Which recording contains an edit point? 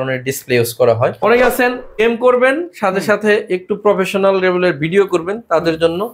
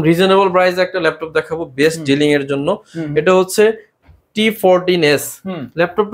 first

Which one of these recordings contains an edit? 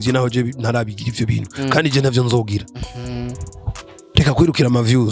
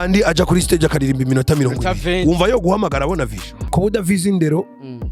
second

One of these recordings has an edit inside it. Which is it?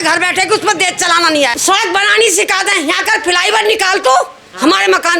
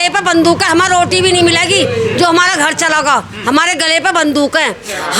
first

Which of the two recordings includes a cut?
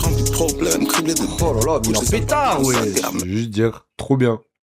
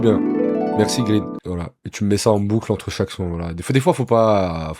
first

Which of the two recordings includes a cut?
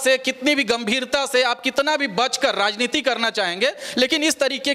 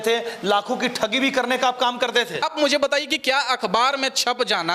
second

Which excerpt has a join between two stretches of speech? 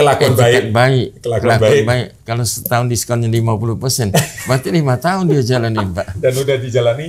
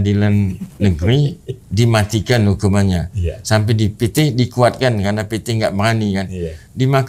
first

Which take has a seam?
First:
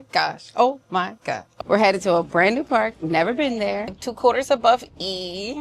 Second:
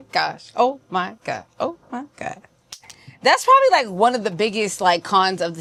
first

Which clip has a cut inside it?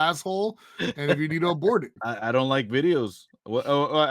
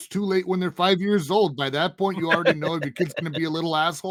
first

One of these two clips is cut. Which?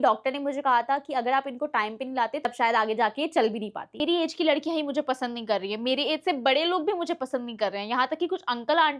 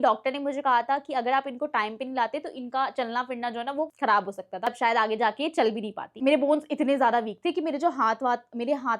first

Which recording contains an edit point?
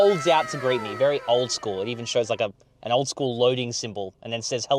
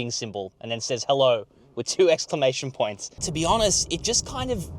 second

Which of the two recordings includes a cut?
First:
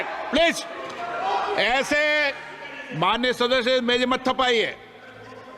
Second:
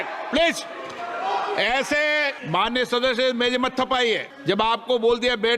second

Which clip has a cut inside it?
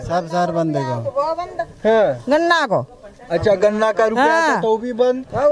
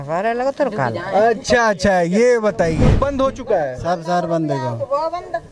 second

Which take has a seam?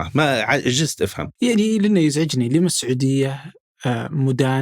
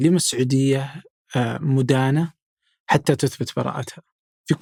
first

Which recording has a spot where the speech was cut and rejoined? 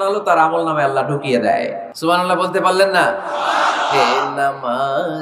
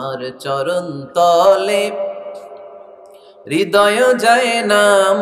first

